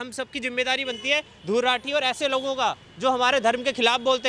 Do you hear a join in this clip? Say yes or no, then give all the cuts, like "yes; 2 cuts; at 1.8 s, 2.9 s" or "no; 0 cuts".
no; 0 cuts